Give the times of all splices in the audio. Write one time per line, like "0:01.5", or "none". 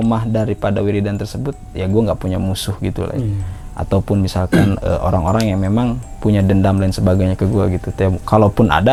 none